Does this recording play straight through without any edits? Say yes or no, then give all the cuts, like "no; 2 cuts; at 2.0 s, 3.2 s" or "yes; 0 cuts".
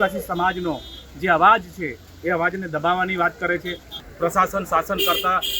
no; 1 cut; at 3.9 s